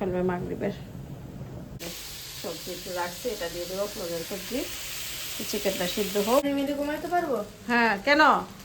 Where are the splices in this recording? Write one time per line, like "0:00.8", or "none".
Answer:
0:01.8
0:06.4